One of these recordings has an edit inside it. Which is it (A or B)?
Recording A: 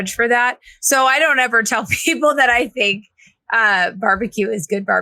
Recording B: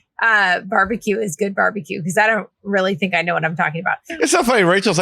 B